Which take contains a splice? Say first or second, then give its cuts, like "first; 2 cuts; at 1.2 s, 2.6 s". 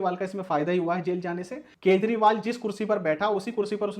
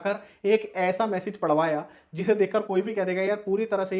first; 1 cut; at 1.6 s